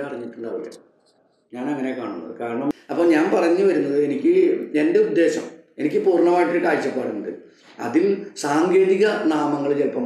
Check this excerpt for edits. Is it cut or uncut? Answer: cut